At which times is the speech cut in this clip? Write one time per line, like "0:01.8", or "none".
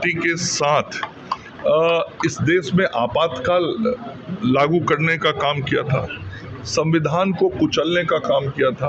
none